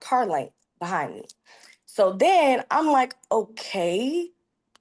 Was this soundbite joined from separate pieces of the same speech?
no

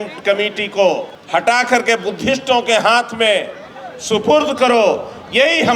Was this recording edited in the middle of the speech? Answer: no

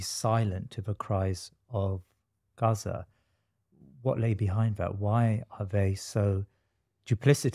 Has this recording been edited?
no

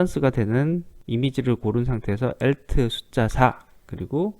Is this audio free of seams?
no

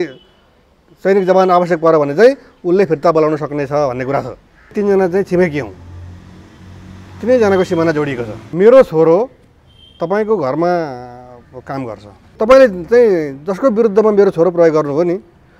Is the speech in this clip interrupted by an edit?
yes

